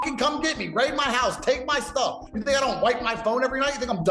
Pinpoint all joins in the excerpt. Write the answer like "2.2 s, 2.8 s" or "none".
2.2 s